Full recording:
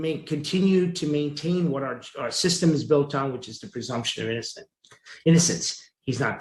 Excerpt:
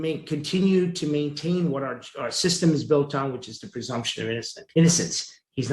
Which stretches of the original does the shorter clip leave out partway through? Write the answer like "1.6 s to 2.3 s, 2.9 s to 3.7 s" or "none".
4.6 s to 5.1 s